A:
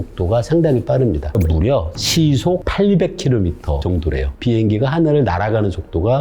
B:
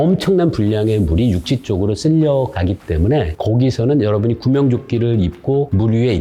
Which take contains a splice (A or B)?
A